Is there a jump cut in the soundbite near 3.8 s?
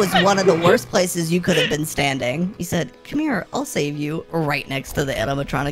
no; 1 cut; at 2.5 s

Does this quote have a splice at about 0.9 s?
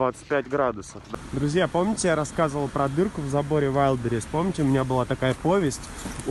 yes; 1 cut; at 0.9 s

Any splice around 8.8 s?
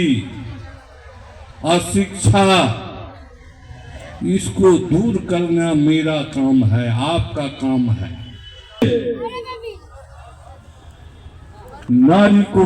yes; 1 cut; at 8.8 s

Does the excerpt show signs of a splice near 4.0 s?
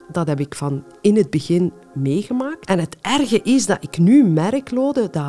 no; 1 cut; at 2.6 s

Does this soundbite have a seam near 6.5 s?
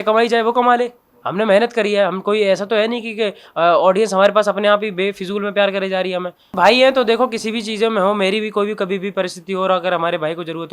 yes; 1 cut; at 6.5 s

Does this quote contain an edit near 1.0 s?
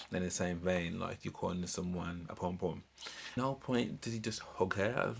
no; 1 cut; at 3.4 s

